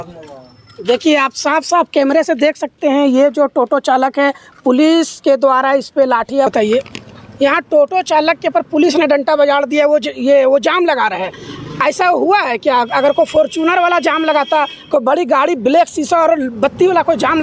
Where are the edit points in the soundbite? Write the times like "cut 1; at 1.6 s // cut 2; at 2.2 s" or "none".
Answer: cut 1; at 6.5 s